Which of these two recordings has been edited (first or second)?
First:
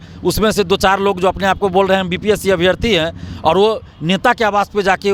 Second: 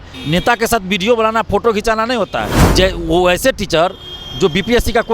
second